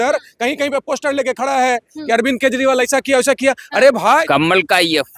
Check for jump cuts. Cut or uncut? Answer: cut